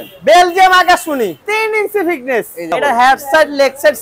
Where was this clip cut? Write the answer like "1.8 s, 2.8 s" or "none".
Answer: 1.4 s, 2.7 s